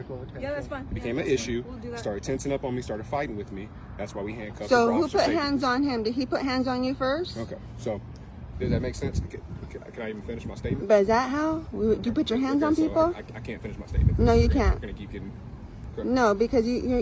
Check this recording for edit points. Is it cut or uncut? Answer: cut